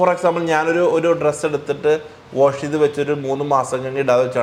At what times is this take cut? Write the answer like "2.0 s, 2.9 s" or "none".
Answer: none

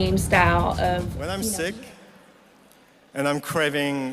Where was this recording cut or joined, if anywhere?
1.2 s

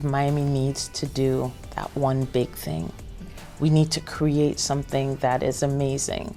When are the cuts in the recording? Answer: none

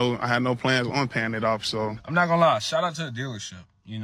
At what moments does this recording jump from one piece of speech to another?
2.0 s

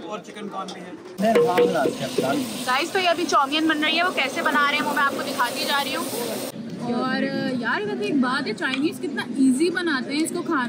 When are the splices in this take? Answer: 1.1 s, 6.5 s

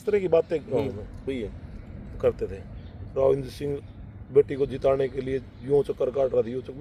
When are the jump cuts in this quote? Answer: none

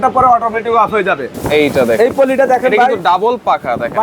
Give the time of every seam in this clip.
1.3 s

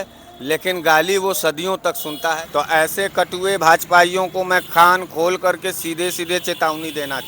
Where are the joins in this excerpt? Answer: 2.4 s

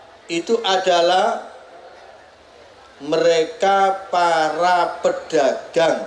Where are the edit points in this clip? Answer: none

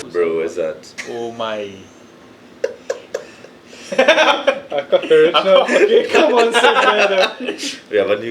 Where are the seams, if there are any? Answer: 0.9 s

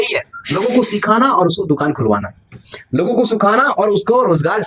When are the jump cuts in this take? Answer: none

